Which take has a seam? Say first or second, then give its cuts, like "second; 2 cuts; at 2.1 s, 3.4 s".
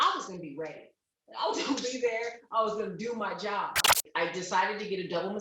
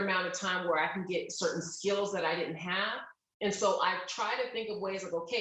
first; 1 cut; at 4.0 s